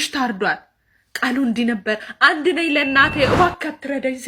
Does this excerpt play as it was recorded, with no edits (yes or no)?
yes